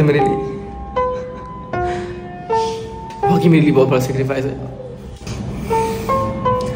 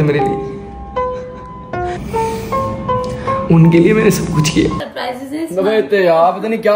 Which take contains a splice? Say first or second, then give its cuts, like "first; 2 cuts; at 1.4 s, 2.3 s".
second; 2 cuts; at 2.0 s, 4.9 s